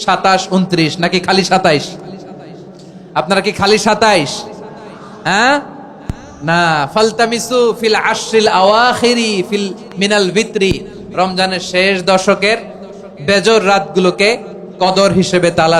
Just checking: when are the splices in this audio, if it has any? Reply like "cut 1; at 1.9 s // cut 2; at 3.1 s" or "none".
none